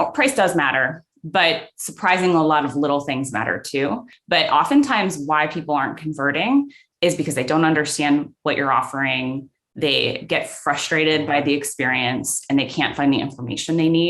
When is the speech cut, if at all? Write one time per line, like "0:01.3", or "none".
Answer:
0:04.1